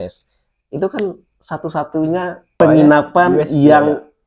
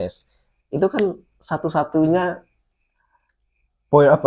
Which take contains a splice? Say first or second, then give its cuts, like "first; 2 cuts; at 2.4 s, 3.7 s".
first; 1 cut; at 2.5 s